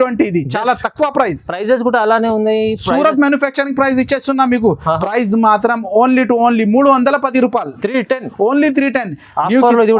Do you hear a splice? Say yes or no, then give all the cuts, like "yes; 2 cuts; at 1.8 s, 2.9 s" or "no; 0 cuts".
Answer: yes; 1 cut; at 4.8 s